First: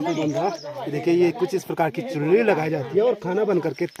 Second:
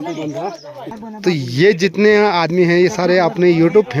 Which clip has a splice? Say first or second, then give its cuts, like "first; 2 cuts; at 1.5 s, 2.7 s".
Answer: second; 1 cut; at 1.0 s